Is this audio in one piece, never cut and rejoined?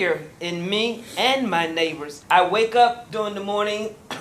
no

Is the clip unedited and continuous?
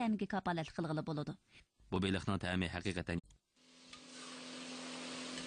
yes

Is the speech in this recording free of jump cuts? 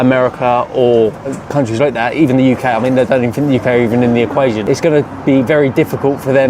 no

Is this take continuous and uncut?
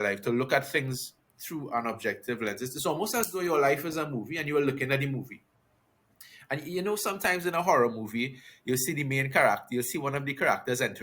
yes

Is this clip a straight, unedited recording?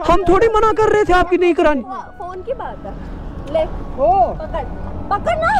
yes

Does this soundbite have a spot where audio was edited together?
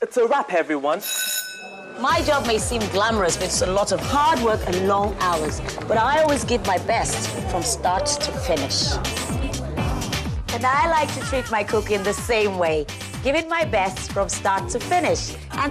no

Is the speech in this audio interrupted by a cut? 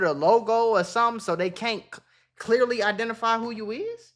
no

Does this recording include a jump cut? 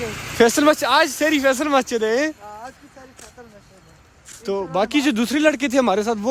no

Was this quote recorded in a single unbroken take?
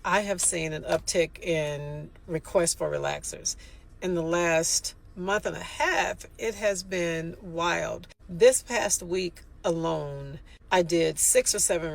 yes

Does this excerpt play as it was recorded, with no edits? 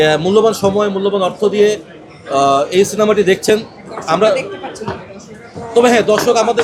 yes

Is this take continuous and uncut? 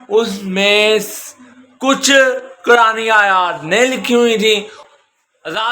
no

